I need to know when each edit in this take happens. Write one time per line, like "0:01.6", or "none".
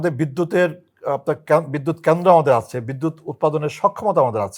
none